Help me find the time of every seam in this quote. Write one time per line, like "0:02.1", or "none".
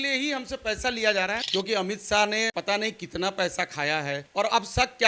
0:01.4
0:02.5
0:04.2